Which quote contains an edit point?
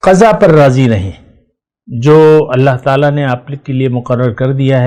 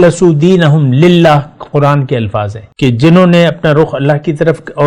second; 1 cut; at 2.6 s

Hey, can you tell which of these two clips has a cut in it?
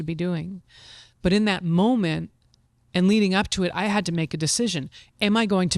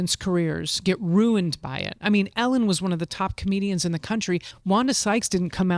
second; 1 cut; at 4.5 s

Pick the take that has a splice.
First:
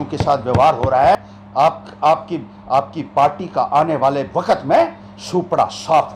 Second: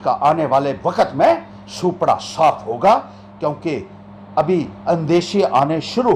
first; 1 cut; at 1.1 s

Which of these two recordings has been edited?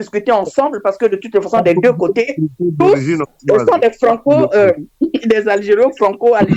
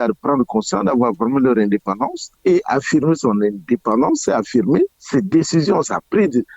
second; 2 cuts; at 2.2 s, 5.0 s

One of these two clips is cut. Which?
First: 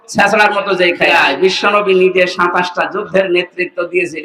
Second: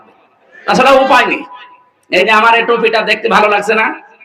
first; 1 cut; at 1.1 s

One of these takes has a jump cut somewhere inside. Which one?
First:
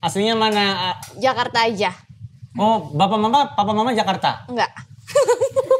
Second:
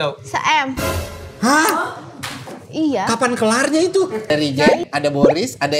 second; 1 cut; at 4.3 s

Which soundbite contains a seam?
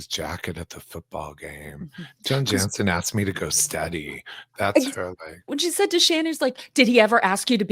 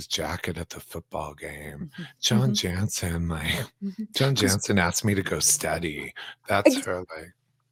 first; 2 cuts; at 2.2 s, 5.5 s

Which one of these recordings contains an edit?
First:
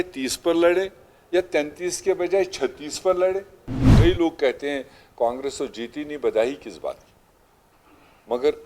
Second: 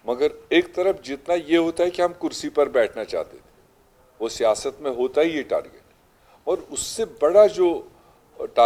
first; 1 cut; at 3.8 s

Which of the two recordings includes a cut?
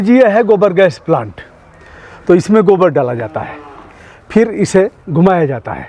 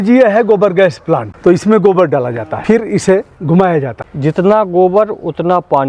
second; 3 cuts; at 1.3 s, 2.5 s, 4.0 s

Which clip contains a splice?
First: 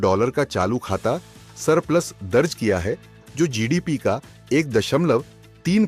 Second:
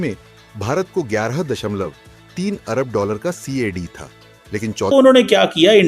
second; 1 cut; at 4.9 s

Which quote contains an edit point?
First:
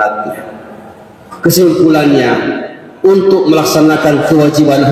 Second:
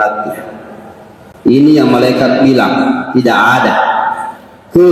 first; 1 cut; at 1.2 s

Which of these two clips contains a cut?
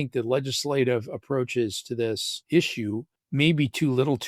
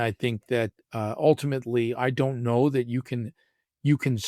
first; 2 cuts; at 2.3 s, 3.2 s

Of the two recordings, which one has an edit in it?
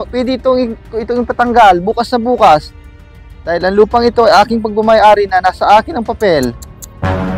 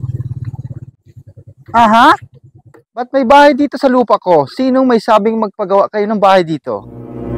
second; 1 cut; at 1.0 s

